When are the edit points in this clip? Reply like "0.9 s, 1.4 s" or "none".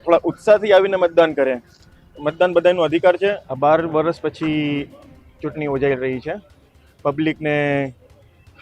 3.5 s